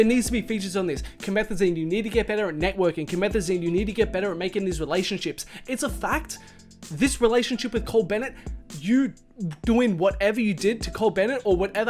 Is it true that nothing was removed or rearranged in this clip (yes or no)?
yes